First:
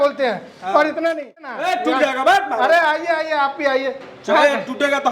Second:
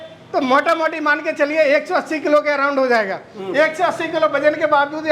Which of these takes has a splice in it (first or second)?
first